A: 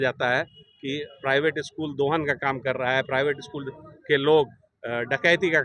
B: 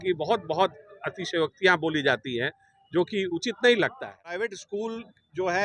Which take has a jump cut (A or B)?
B